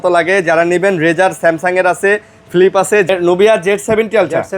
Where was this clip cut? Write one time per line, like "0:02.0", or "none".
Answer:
0:03.1